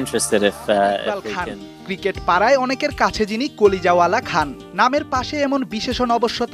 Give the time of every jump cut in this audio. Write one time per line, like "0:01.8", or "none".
0:01.3